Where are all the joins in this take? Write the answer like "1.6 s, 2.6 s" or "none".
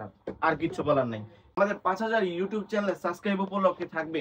1.4 s